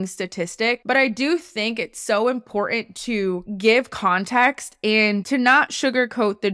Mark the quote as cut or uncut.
cut